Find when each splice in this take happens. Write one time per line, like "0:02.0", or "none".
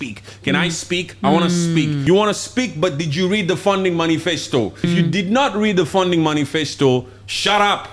0:02.0
0:04.9